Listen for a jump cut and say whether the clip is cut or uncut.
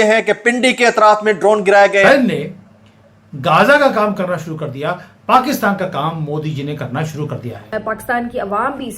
cut